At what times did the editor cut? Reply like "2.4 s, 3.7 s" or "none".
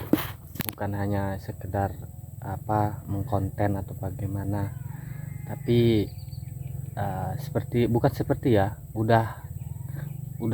none